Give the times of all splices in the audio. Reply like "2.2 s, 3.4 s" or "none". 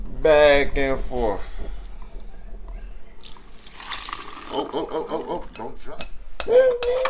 5.8 s